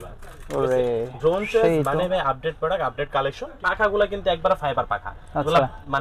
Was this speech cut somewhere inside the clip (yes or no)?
yes